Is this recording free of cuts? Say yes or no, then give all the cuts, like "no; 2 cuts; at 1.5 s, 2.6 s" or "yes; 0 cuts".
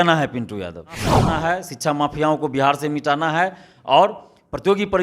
no; 1 cut; at 1.3 s